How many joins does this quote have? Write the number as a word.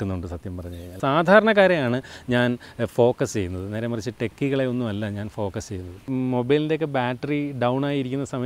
two